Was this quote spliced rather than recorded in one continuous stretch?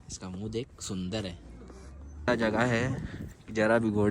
yes; 1 cut; at 2.3 s

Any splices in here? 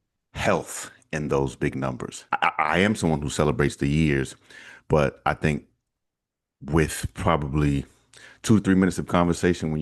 yes; 1 cut; at 2.2 s

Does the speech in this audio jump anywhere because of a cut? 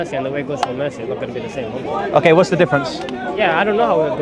no; 0 cuts

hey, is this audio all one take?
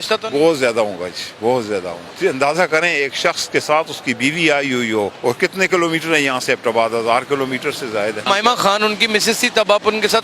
no; 3 cuts; at 2.0 s, 5.2 s, 8.3 s

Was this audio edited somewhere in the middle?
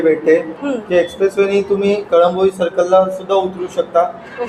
no; 0 cuts

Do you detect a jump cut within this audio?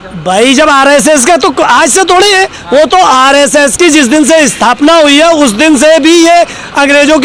no; 0 cuts

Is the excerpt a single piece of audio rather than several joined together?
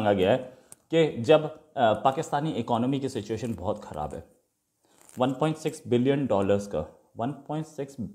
yes; 0 cuts

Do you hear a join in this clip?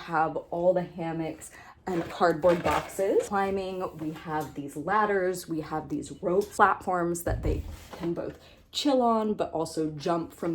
yes; 3 cuts; at 2.1 s, 3.3 s, 6.5 s

